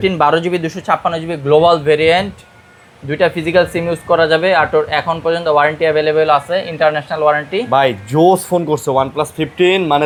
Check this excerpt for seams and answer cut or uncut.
uncut